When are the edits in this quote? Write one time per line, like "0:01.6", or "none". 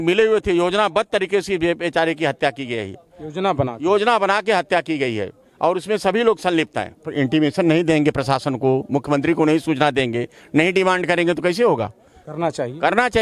0:07.1